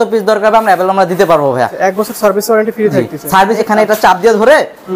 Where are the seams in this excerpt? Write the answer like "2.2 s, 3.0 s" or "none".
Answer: 1.7 s, 3.6 s